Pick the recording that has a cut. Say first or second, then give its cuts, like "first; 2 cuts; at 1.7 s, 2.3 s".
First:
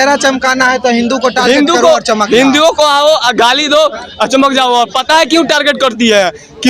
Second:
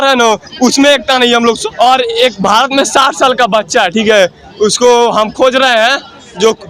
second; 1 cut; at 1.6 s